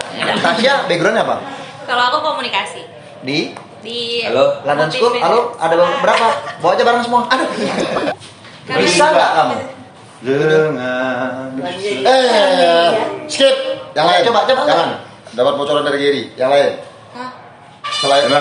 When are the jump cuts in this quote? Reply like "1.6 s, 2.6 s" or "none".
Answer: 8.2 s